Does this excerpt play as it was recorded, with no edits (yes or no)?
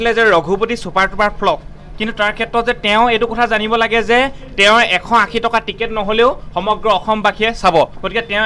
yes